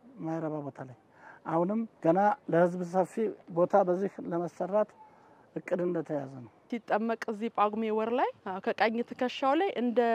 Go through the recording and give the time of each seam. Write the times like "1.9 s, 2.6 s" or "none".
1.9 s, 3.4 s, 6.7 s, 8.5 s